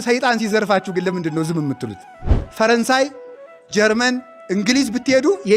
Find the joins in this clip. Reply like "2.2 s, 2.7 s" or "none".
2.4 s